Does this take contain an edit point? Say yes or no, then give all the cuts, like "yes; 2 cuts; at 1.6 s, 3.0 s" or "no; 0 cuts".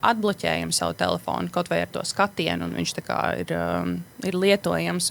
no; 0 cuts